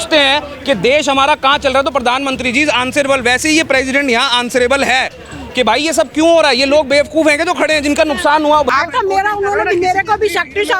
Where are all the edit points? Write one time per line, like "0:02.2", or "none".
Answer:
0:08.7